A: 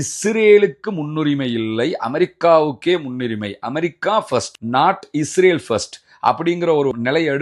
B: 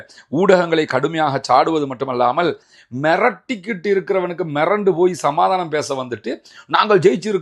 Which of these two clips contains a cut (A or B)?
B